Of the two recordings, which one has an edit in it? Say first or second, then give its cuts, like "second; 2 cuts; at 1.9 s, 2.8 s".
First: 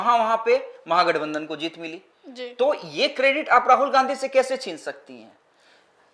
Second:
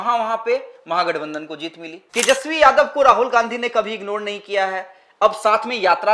second; 1 cut; at 2.0 s